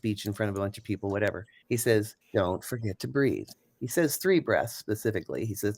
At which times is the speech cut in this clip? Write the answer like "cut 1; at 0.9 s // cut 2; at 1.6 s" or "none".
cut 1; at 1.5 s // cut 2; at 2.2 s // cut 3; at 3.5 s